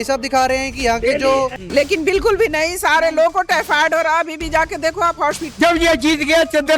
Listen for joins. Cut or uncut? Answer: cut